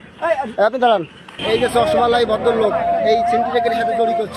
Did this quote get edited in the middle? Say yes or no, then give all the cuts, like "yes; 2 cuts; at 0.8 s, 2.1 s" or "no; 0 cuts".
yes; 1 cut; at 1.4 s